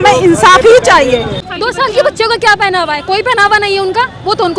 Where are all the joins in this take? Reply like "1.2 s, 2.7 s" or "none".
1.3 s